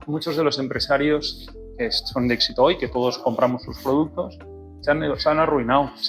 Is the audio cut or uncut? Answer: uncut